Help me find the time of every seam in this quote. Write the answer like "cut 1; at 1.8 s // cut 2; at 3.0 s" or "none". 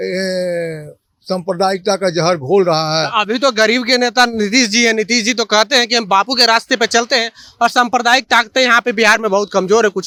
none